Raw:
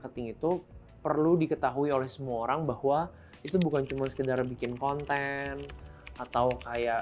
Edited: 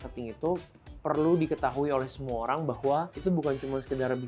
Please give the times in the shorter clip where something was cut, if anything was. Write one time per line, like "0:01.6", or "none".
0:03.1